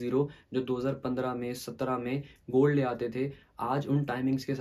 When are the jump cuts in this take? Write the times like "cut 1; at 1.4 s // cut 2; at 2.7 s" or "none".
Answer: none